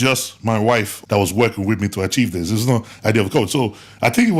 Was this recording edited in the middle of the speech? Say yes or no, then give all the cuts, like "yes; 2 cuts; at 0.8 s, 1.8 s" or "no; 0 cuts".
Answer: yes; 1 cut; at 0.9 s